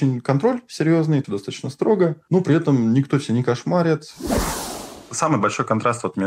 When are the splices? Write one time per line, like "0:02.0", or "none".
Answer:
0:01.2
0:04.6